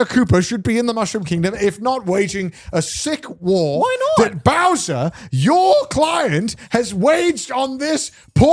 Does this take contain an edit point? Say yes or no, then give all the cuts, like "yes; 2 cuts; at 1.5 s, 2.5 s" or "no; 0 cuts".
no; 0 cuts